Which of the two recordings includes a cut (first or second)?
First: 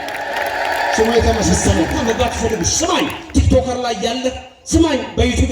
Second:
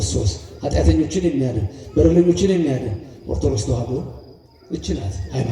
first